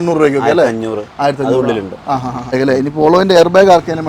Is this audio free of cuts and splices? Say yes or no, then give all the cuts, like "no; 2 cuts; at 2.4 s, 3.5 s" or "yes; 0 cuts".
no; 1 cut; at 2.6 s